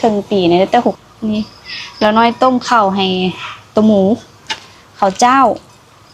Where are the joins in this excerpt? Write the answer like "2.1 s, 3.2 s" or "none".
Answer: 1.0 s